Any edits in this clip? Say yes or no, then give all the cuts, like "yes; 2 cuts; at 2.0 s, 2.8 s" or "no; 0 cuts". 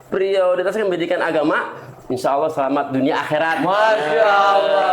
no; 0 cuts